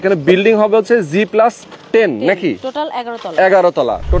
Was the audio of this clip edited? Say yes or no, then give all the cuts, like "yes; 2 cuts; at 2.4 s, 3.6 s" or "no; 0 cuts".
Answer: yes; 1 cut; at 1.7 s